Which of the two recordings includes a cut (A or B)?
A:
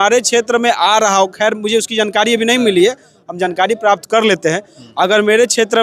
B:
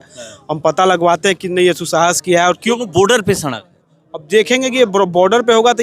B